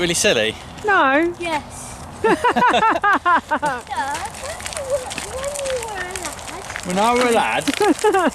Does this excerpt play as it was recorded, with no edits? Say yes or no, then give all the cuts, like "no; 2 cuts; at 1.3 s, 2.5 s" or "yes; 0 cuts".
no; 1 cut; at 3.8 s